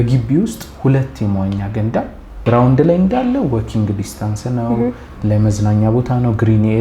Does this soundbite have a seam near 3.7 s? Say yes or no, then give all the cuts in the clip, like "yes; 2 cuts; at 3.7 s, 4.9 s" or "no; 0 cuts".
no; 1 cut; at 2.4 s